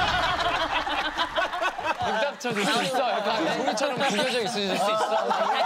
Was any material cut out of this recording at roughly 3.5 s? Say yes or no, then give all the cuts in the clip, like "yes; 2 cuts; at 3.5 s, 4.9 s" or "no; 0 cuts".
yes; 1 cut; at 3.5 s